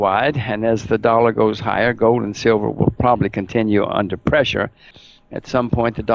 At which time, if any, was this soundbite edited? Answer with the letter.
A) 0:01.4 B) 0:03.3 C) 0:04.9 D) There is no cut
C